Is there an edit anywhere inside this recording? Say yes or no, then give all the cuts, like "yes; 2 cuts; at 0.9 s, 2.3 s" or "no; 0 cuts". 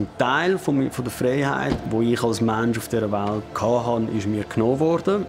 yes; 2 cuts; at 1.8 s, 3.5 s